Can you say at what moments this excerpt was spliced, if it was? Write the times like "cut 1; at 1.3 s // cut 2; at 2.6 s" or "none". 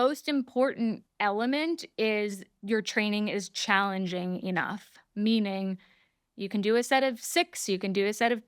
cut 1; at 1.1 s // cut 2; at 2.5 s